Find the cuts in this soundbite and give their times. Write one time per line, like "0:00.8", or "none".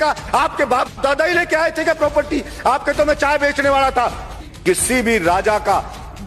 0:04.4